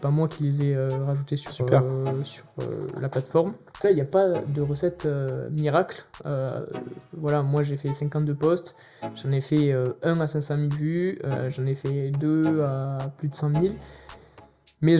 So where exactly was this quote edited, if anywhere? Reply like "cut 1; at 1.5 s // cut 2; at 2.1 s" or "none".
cut 1; at 3.8 s